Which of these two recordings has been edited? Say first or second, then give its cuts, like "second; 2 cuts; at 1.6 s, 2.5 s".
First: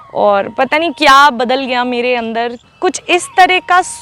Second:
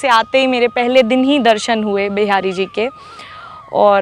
first; 1 cut; at 2.6 s